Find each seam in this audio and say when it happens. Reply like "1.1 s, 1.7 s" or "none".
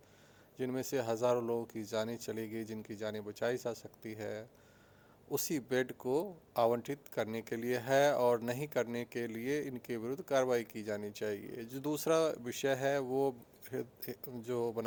none

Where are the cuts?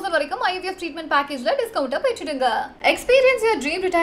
none

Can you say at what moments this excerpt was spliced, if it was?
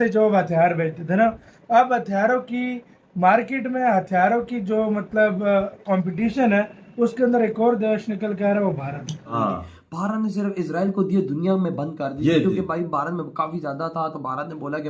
9.3 s

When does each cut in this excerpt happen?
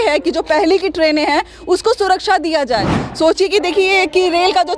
3.0 s

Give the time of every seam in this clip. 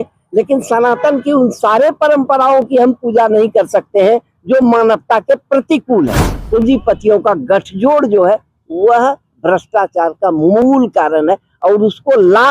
6.3 s

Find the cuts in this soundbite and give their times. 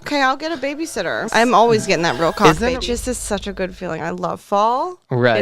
1.2 s, 2.8 s

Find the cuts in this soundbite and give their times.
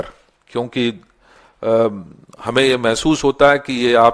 none

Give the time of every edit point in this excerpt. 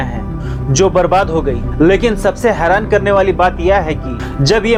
none

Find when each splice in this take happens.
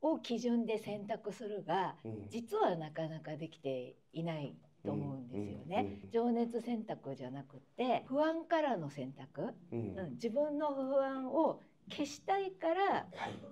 none

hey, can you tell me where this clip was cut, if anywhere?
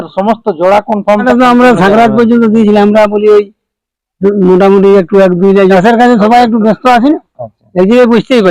1.2 s, 5.7 s

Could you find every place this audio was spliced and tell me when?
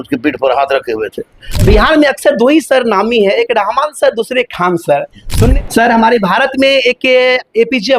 1.6 s, 5.5 s

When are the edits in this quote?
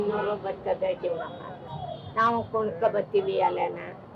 none

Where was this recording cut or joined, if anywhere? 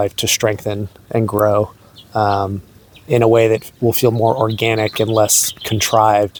none

